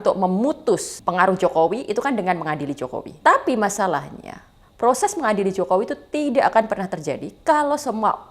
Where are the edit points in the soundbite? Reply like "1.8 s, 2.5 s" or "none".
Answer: 0.9 s, 3.1 s